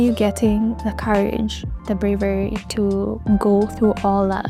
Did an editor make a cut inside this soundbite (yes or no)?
no